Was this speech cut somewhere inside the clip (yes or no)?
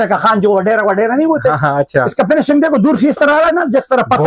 no